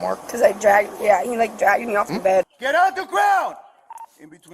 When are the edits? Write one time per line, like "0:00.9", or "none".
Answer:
0:02.5